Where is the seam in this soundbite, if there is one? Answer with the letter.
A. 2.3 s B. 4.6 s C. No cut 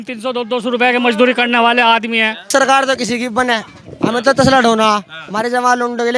A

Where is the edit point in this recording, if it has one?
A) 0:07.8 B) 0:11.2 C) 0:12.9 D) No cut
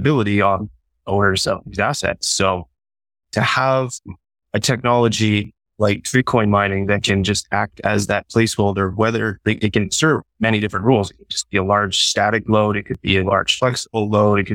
D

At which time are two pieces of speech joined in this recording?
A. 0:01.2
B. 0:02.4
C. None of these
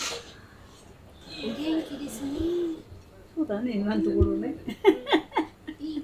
A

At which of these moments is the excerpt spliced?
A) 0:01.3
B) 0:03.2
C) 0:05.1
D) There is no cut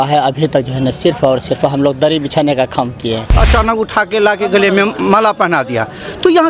B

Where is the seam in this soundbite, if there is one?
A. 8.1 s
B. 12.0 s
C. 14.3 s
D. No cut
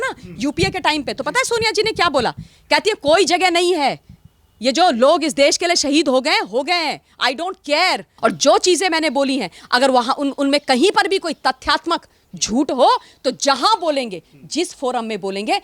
A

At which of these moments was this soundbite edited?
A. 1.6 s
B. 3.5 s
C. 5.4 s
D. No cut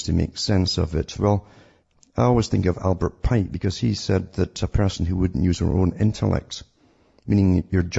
B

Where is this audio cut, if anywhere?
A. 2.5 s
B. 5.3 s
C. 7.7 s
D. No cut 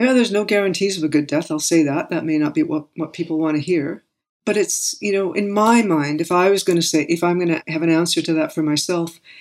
C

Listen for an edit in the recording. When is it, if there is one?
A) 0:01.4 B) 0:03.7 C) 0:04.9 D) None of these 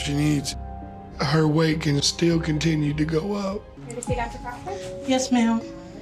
B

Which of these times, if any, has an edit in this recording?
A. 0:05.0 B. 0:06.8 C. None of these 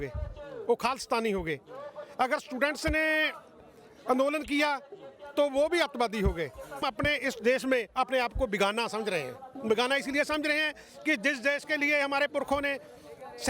B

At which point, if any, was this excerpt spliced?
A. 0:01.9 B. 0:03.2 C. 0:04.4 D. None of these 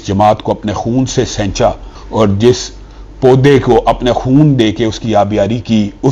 A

